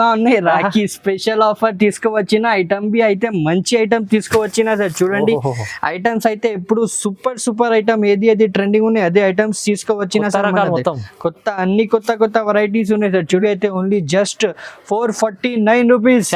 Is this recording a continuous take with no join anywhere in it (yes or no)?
no